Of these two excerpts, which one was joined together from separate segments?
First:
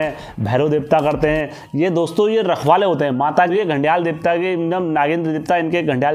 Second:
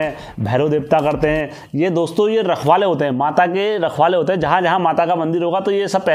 first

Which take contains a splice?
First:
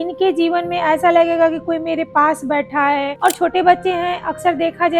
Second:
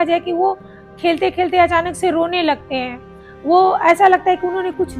first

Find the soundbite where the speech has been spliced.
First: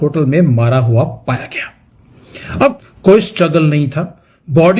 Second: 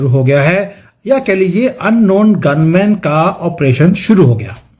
first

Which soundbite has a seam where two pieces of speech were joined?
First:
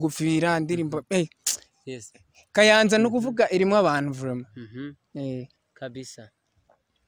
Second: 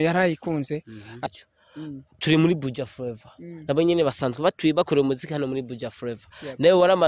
second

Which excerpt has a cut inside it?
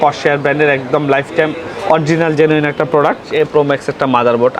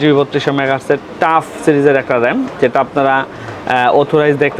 first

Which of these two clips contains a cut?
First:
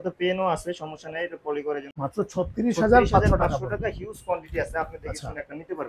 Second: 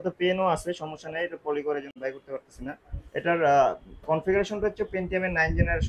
first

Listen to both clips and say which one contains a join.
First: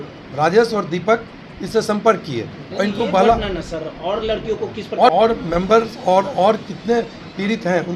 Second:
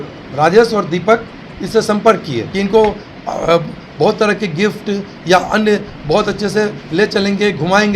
second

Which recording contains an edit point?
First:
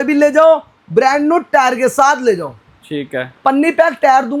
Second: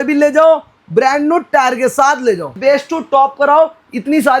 second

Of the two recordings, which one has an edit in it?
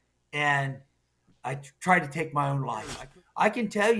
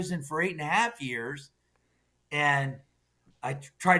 first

